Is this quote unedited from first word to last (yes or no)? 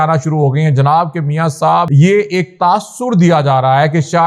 no